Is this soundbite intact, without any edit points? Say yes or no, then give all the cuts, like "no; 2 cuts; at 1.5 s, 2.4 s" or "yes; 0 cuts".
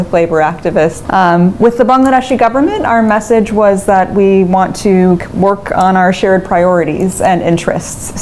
no; 1 cut; at 1.0 s